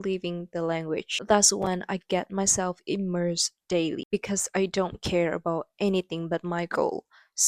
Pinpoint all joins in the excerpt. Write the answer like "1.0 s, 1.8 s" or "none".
4.0 s